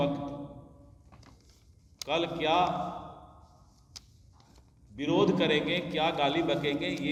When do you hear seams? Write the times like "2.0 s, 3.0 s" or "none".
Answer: none